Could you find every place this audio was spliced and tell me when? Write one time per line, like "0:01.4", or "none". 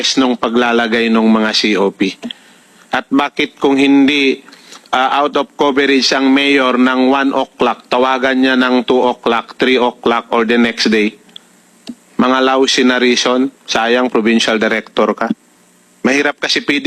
none

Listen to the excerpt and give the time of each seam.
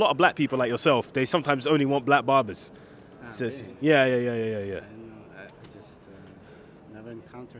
none

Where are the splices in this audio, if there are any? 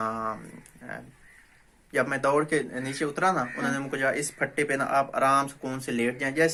none

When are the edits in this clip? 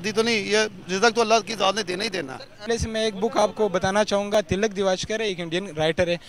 0:02.7

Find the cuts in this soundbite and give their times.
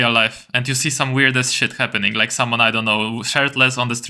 none

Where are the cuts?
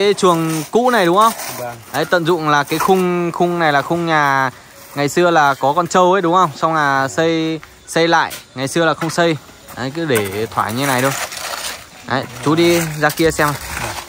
none

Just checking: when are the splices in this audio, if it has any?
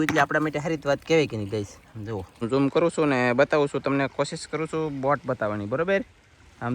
0:02.4

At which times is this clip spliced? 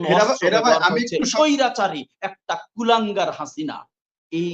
0:01.3

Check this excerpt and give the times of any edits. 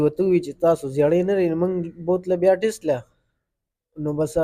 none

